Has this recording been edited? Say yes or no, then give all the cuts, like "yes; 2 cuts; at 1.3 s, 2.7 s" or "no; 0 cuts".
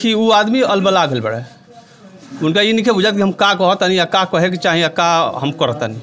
no; 0 cuts